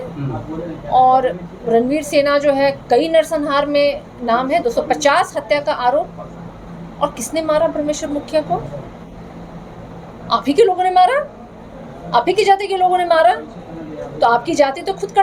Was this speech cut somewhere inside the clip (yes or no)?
no